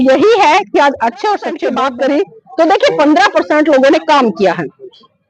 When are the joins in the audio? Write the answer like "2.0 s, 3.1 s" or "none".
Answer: 1.7 s